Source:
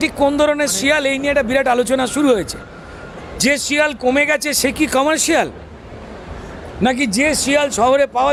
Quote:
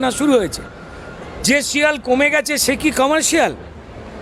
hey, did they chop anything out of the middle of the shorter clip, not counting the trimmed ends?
no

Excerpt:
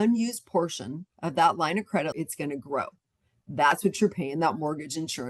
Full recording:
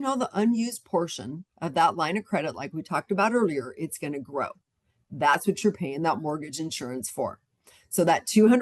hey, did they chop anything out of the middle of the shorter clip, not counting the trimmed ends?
yes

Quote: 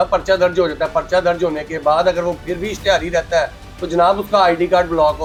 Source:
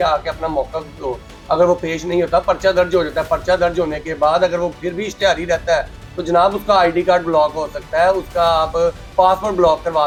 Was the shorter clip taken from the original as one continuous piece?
yes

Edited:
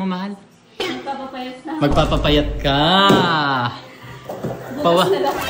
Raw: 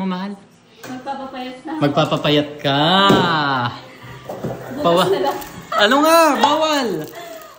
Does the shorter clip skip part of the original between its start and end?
no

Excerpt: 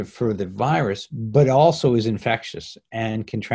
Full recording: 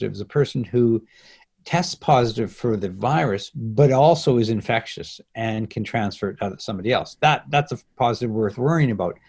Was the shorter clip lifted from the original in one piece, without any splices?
yes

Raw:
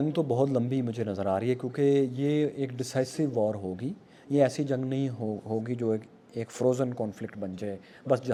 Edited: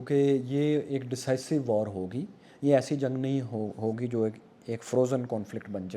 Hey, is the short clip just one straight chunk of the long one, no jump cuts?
yes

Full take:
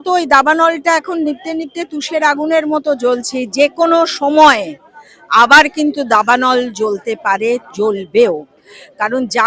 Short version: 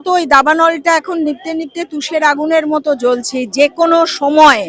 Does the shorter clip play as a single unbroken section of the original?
yes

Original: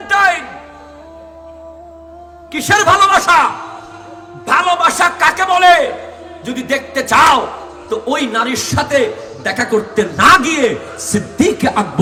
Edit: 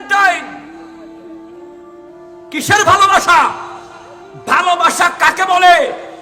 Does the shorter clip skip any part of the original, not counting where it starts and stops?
no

